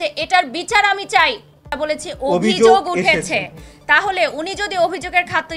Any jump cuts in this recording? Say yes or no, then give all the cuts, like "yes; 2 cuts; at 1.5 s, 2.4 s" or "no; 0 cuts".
yes; 1 cut; at 1.8 s